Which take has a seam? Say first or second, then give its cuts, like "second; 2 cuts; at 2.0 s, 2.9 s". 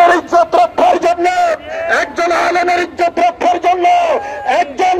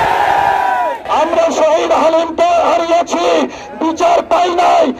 second; 1 cut; at 1.0 s